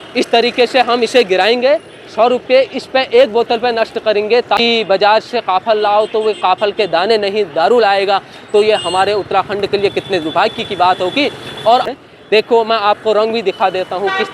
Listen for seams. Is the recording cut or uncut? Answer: cut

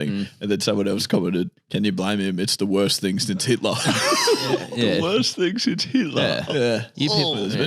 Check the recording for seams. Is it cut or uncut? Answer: cut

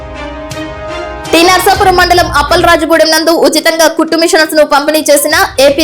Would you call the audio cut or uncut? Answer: cut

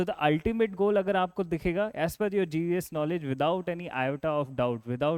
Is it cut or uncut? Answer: uncut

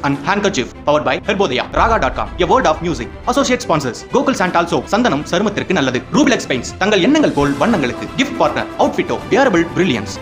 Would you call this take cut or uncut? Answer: uncut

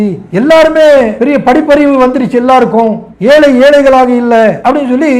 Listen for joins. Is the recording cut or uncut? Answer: uncut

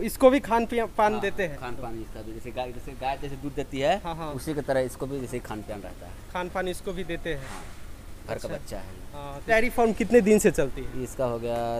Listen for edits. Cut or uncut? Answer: cut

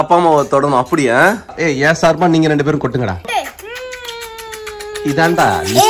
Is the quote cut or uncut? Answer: cut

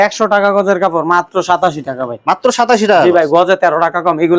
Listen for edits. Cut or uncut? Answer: uncut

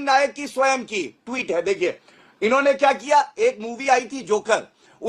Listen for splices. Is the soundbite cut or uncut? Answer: uncut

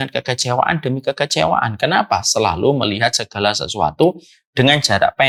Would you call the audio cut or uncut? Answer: uncut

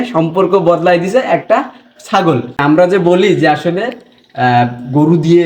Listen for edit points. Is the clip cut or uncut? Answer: cut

